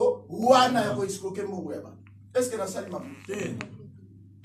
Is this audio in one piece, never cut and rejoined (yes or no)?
yes